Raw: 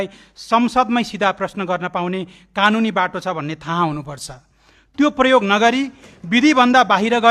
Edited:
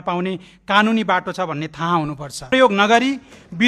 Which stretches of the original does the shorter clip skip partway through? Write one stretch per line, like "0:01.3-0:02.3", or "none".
0:04.4-0:05.2